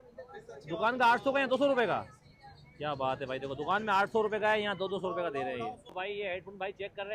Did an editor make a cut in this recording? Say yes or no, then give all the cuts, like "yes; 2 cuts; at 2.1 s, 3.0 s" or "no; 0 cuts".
no; 0 cuts